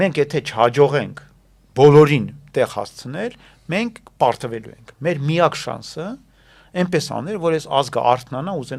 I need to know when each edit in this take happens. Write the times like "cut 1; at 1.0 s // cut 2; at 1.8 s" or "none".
none

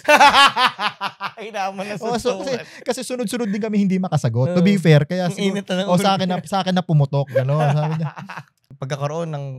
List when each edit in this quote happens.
cut 1; at 8.7 s

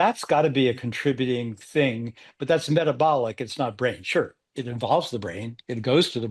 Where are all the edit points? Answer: none

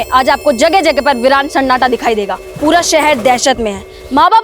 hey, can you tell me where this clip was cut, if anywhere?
cut 1; at 2.4 s

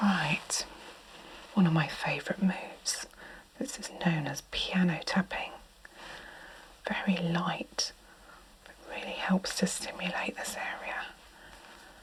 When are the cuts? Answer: none

